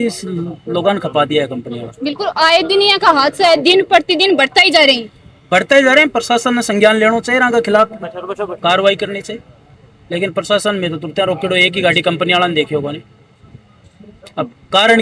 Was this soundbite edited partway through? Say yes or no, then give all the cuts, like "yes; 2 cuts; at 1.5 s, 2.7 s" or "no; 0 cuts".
no; 0 cuts